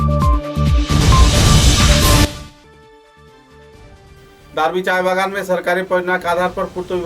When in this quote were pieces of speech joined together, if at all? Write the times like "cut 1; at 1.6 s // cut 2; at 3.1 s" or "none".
cut 1; at 4.0 s